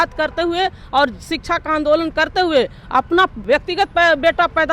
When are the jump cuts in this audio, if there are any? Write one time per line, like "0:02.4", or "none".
0:03.4